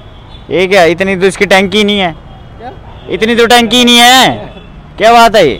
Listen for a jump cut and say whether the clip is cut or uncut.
uncut